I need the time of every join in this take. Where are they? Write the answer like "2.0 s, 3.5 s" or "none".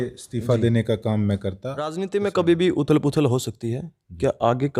2.0 s